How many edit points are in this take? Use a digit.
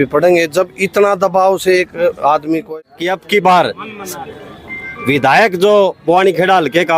1